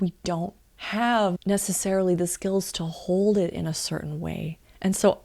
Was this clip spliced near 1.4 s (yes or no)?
yes